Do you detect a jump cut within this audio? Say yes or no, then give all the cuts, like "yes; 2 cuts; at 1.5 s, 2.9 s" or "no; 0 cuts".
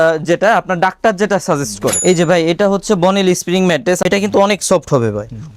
yes; 2 cuts; at 2.0 s, 4.0 s